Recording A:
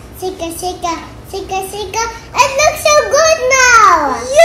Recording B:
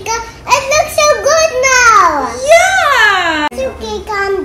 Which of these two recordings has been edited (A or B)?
B